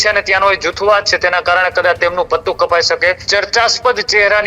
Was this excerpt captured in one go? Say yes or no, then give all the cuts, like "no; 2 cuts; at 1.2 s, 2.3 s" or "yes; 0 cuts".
no; 1 cut; at 3.2 s